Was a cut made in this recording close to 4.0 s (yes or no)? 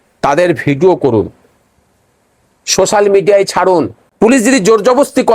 yes